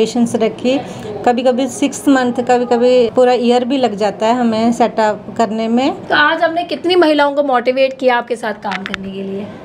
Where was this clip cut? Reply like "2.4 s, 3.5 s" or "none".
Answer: 3.1 s, 6.0 s